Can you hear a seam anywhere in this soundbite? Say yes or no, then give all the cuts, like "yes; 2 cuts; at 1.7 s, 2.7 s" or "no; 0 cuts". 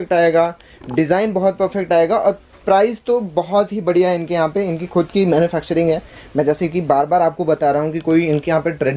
no; 0 cuts